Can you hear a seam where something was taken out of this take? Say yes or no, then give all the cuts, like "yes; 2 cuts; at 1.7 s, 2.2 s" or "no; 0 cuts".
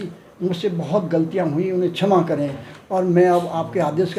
no; 0 cuts